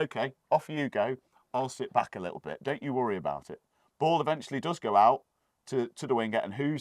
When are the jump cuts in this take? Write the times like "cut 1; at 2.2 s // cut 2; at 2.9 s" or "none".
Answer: cut 1; at 3.8 s